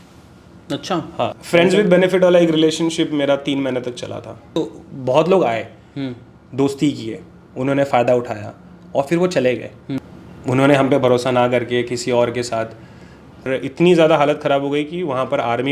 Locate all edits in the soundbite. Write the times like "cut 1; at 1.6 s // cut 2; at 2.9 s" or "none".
cut 1; at 1.4 s // cut 2; at 4.5 s // cut 3; at 9.8 s // cut 4; at 13.5 s